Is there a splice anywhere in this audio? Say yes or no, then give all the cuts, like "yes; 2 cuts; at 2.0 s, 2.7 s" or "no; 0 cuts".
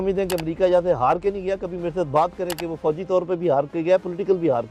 no; 0 cuts